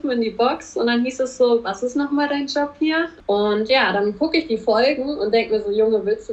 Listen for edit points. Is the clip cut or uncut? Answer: cut